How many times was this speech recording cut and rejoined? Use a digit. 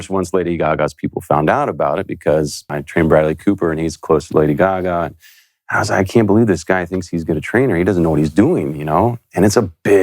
1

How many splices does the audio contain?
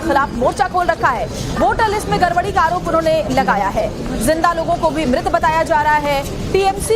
0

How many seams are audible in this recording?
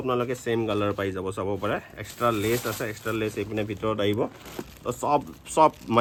0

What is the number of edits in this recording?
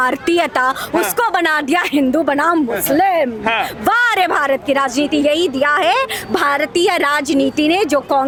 0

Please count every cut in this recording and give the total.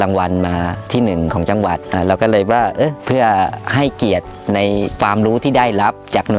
4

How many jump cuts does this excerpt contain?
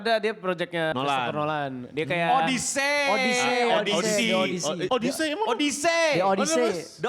1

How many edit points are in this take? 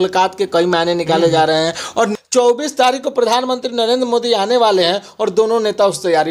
1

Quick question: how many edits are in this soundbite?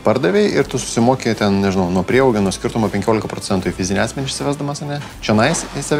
0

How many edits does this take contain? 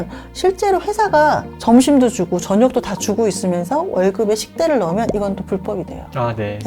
1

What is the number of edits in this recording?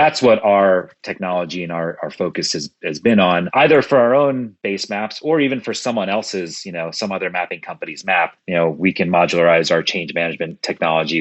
2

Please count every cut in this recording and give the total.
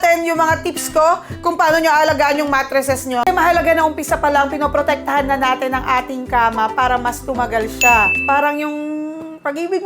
1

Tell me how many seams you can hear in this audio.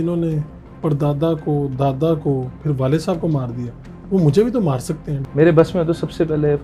1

